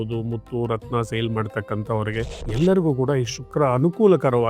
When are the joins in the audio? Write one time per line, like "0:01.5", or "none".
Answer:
0:02.4

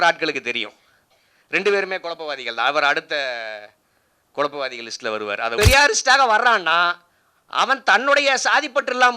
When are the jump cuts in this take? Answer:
0:05.5

